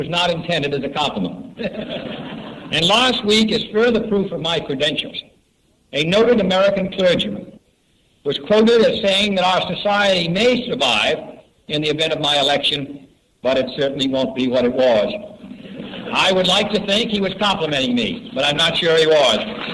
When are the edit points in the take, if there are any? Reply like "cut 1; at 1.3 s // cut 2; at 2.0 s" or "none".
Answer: none